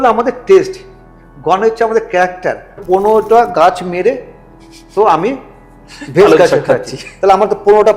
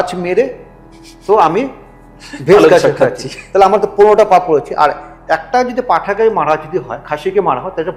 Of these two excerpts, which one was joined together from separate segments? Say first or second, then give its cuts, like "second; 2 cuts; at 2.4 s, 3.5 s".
first; 1 cut; at 2.7 s